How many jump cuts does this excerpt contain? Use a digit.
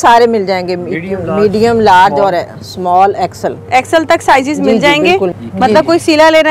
1